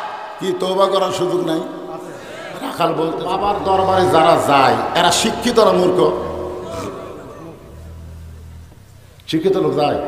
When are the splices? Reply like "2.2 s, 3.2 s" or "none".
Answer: 3.3 s